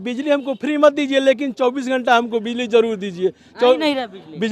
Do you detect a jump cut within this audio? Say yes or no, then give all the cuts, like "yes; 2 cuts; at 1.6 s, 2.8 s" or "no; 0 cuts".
no; 0 cuts